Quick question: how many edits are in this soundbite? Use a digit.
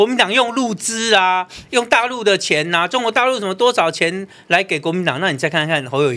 0